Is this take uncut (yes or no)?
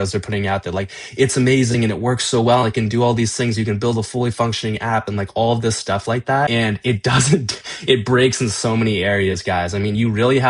no